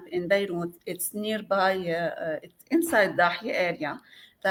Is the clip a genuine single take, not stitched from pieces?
yes; 0 cuts

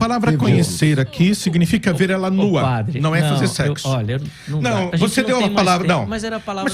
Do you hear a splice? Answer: no; 0 cuts

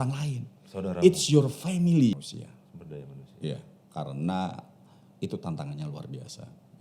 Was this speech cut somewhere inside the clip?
yes; 1 cut; at 2.1 s

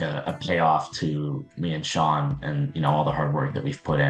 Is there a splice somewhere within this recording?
no; 0 cuts

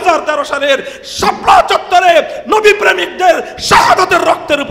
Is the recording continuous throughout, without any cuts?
yes; 0 cuts

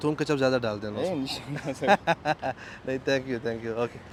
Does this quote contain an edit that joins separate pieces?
no; 0 cuts

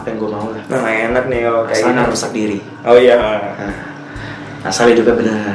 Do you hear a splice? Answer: no; 0 cuts

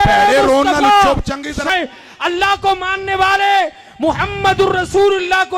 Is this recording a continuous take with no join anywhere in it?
no; 1 cut; at 1.6 s

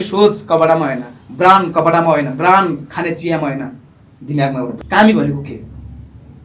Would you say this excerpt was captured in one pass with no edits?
no; 1 cut; at 4.7 s

